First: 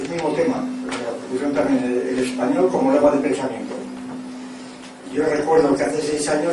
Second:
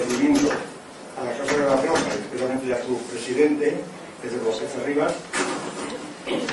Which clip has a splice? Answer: first; 1 cut; at 3.2 s

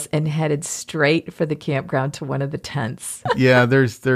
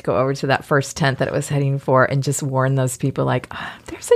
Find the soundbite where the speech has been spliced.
first; 1 cut; at 3.2 s

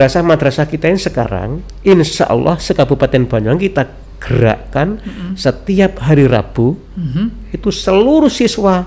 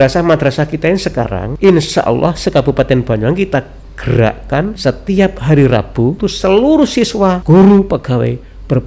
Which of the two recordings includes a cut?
second; 4 cuts; at 1.4 s, 4.8 s, 6.2 s, 7.4 s

